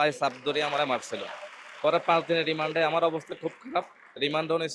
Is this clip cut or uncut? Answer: uncut